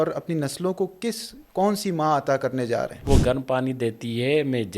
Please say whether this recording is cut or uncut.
cut